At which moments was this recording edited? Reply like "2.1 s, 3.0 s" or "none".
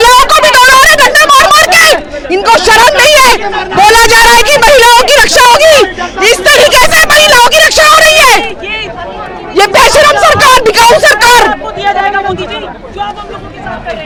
none